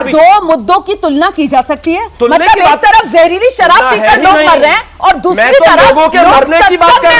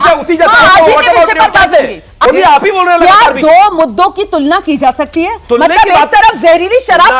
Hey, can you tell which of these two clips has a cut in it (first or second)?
second